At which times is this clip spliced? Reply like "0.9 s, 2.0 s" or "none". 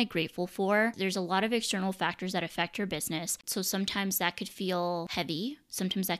1.0 s, 3.4 s, 5.1 s